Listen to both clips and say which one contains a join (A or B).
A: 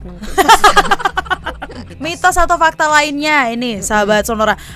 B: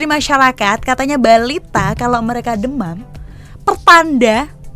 A